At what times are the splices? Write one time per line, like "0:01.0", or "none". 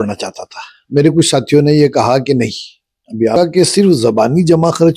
0:03.4